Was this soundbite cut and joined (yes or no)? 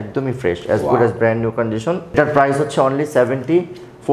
no